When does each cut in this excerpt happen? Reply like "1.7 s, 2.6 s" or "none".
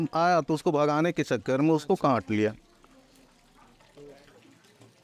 none